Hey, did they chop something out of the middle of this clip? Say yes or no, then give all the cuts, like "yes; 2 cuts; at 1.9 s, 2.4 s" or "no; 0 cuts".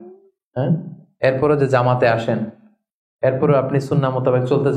no; 0 cuts